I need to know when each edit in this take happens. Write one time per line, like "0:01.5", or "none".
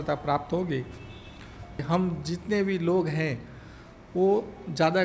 0:01.8